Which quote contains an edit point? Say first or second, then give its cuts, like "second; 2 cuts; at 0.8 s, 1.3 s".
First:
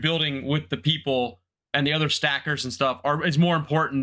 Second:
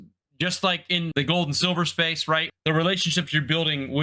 second; 2 cuts; at 1.1 s, 2.5 s